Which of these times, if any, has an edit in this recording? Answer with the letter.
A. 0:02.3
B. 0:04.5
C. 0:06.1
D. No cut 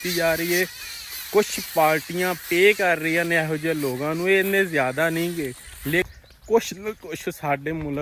C